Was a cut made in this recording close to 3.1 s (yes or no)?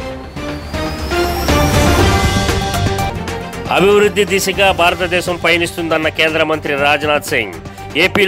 yes